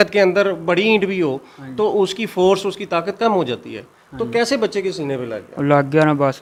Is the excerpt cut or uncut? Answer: uncut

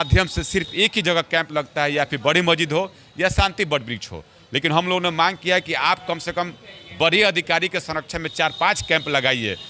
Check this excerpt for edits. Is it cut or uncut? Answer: uncut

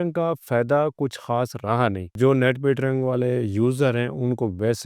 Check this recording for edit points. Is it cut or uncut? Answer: cut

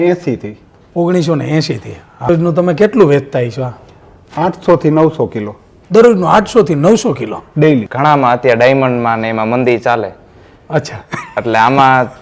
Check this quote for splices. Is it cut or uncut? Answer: cut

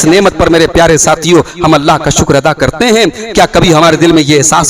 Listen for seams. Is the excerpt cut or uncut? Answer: uncut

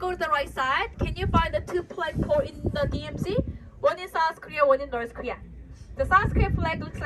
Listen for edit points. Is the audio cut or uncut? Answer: uncut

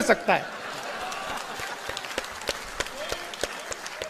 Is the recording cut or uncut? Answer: uncut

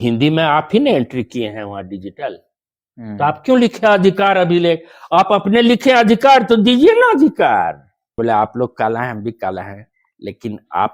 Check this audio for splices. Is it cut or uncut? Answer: cut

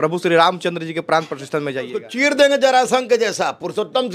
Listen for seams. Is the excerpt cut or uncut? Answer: cut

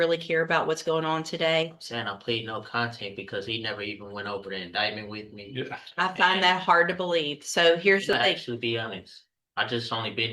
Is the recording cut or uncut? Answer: uncut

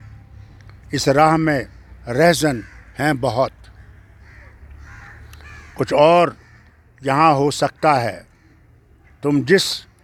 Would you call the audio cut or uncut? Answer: uncut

